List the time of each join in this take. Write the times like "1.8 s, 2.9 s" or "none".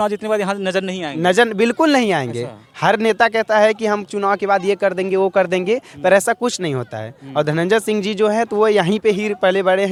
none